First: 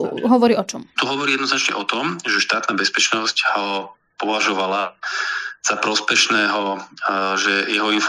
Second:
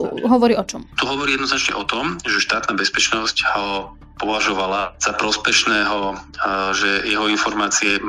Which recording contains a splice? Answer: second; 1 cut; at 5.0 s

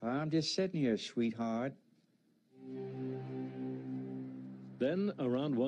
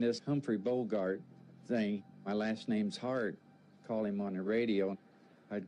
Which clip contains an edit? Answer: second; 1 cut; at 4.2 s

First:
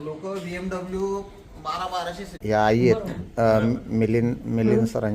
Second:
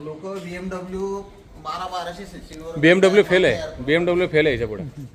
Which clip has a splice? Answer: first; 1 cut; at 2.3 s

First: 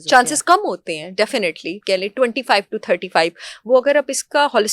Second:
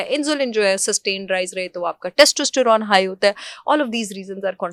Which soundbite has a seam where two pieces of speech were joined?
first; 1 cut; at 1.8 s

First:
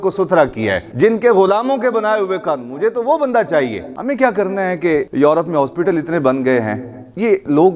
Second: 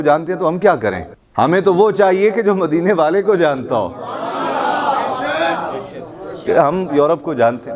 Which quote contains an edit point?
first; 3 cuts; at 0.9 s, 3.9 s, 5.1 s

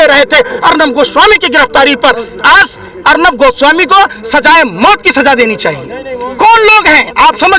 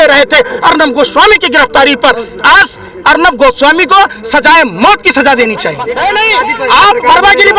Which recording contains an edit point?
second; 1 cut; at 5.8 s

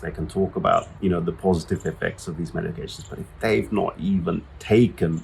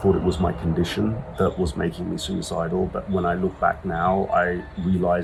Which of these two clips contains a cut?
first; 1 cut; at 0.9 s

